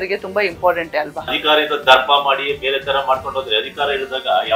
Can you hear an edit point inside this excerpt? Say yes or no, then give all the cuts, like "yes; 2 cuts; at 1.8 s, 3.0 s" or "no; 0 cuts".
yes; 1 cut; at 1.3 s